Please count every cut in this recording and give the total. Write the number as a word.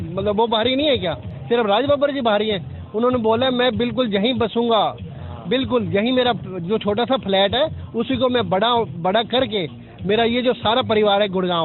zero